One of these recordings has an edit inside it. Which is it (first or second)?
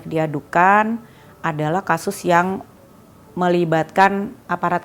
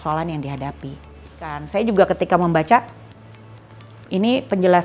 second